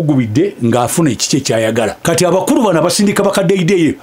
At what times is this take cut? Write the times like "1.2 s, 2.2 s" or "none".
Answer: 2.0 s